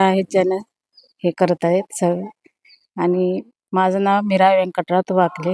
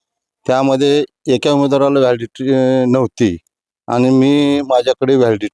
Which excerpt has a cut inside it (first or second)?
first